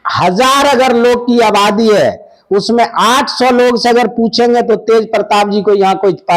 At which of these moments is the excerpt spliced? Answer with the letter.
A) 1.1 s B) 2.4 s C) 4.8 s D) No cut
D